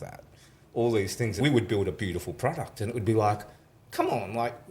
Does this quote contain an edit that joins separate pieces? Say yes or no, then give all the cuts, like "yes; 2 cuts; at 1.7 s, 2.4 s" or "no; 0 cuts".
yes; 1 cut; at 1.3 s